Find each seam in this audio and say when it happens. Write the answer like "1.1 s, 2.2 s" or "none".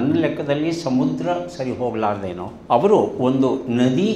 2.5 s